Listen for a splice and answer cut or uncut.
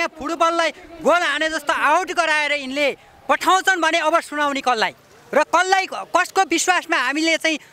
uncut